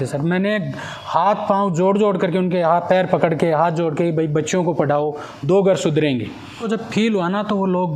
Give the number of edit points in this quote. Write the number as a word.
one